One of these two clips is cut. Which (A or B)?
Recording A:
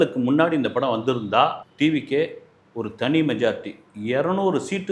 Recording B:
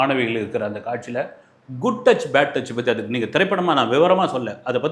A